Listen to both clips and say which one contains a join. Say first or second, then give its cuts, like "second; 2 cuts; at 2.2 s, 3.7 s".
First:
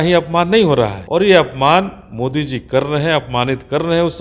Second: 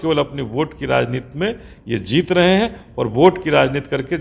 first; 1 cut; at 1.0 s